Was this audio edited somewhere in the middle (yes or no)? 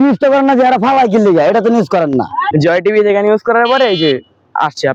no